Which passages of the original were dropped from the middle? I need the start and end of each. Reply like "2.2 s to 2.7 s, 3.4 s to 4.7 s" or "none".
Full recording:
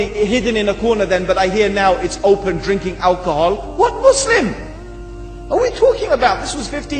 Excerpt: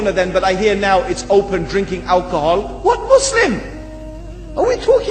none